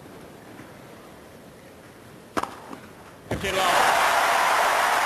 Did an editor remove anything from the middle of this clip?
yes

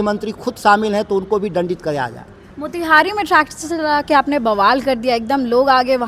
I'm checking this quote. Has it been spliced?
no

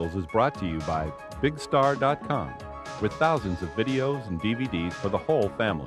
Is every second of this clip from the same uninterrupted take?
yes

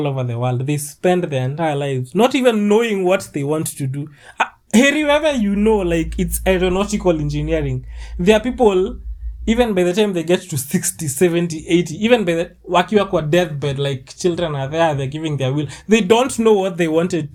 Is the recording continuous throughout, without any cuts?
yes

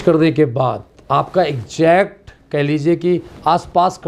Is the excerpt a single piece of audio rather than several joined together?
yes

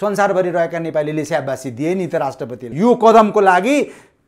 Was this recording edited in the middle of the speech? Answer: yes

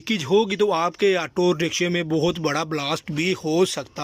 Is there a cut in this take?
no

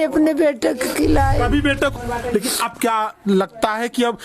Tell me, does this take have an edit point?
yes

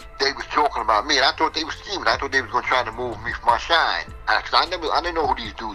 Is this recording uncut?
yes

